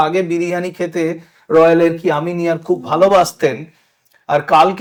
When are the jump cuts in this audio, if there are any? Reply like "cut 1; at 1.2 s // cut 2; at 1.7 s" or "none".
none

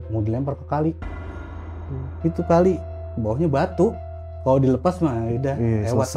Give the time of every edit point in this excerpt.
none

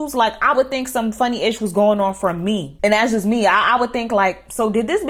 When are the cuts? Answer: none

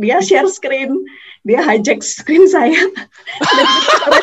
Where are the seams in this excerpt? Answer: none

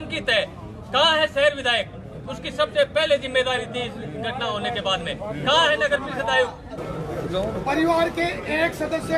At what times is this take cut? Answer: cut 1; at 6.9 s

